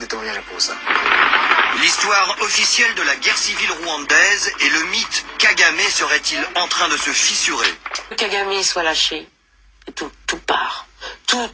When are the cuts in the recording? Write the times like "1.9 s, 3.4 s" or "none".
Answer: 8.1 s